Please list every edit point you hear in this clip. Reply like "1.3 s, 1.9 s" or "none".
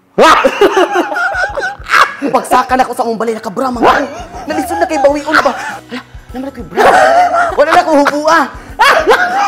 5.8 s, 7.5 s